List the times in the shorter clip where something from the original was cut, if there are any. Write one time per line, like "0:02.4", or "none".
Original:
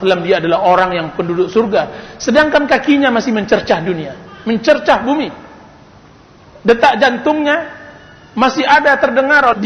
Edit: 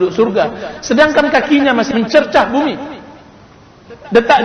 0:01.9